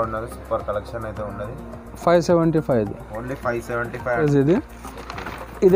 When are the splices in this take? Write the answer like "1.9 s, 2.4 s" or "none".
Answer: 4.2 s